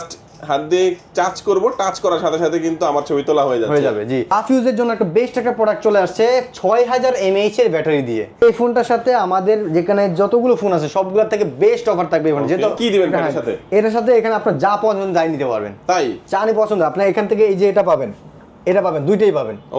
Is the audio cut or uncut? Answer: cut